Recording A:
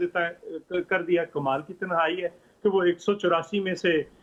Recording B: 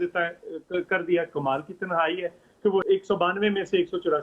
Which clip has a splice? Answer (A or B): B